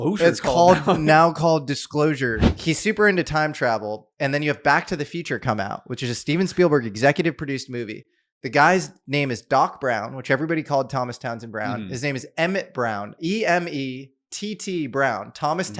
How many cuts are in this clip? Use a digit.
1